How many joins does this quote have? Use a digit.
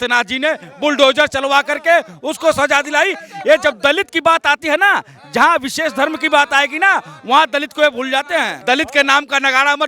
1